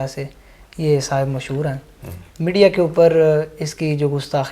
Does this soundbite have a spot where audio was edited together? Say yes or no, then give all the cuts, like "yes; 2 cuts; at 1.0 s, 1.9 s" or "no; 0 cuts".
no; 0 cuts